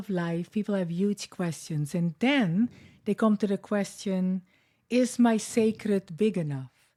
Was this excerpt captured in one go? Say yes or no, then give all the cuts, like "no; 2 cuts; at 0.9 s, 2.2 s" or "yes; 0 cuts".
yes; 0 cuts